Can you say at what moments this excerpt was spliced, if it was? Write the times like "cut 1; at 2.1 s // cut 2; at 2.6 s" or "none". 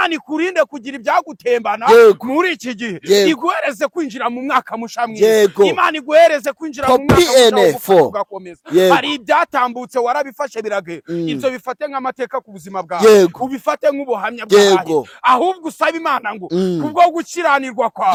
none